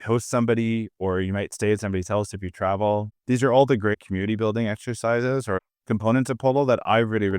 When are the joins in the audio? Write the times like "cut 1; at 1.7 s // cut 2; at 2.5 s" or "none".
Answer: cut 1; at 3.1 s // cut 2; at 3.9 s // cut 3; at 5.6 s